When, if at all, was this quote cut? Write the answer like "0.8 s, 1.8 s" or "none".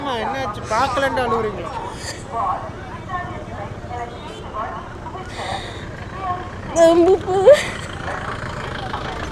none